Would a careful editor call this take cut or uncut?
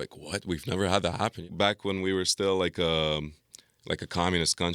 cut